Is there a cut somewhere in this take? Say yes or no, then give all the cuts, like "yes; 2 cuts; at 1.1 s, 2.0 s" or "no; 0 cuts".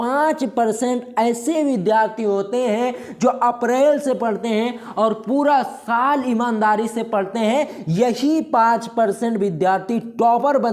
no; 0 cuts